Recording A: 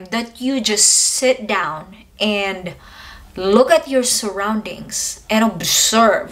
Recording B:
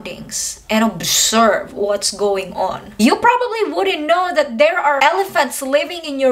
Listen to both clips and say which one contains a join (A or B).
B